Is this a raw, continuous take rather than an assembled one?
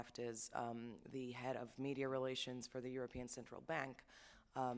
no; 1 cut; at 2.4 s

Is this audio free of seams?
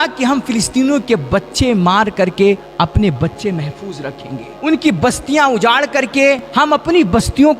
no; 3 cuts; at 2.7 s, 4.5 s, 6.5 s

